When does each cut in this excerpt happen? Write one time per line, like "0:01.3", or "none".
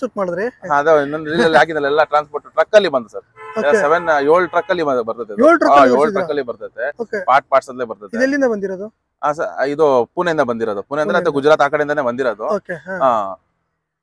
none